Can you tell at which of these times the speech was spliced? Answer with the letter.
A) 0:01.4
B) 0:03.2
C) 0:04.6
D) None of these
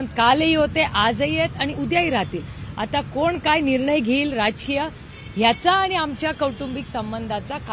D